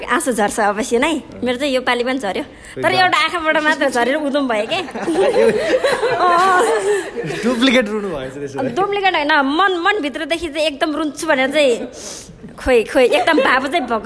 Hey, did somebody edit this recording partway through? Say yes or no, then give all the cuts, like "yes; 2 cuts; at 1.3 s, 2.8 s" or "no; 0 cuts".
no; 0 cuts